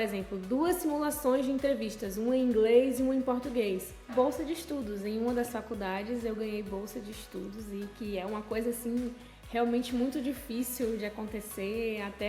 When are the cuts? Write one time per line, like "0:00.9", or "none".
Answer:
0:04.1